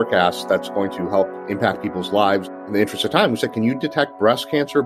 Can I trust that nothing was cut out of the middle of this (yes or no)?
no